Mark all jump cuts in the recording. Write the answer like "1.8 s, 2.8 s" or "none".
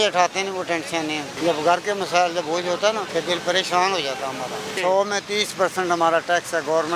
1.3 s, 3.0 s, 4.7 s